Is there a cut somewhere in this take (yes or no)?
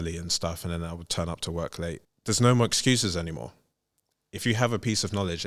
yes